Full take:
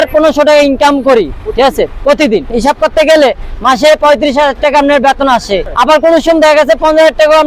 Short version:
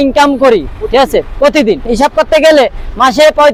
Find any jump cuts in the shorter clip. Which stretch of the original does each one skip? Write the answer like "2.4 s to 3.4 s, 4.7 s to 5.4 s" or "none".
none